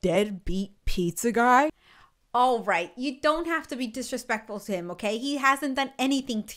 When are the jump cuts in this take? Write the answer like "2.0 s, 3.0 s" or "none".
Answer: none